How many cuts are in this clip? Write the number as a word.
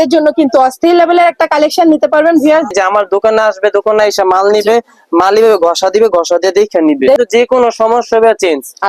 two